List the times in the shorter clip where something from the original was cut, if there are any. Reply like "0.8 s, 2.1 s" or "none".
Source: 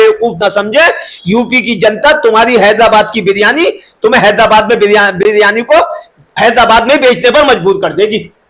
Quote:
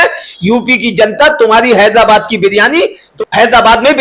3.1 s